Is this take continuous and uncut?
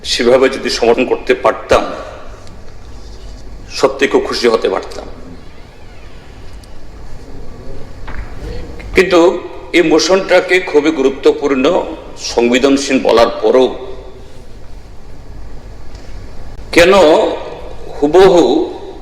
no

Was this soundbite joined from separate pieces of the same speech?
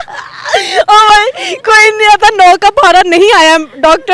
no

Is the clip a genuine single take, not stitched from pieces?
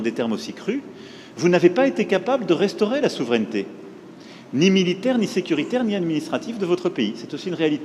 yes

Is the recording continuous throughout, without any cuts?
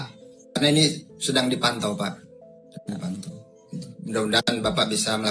yes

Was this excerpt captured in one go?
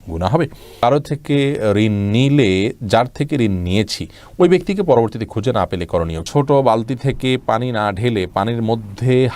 no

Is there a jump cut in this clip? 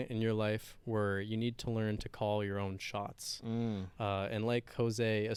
no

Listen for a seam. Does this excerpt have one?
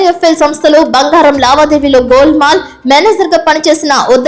no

